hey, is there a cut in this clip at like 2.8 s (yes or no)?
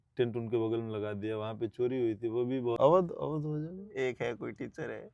yes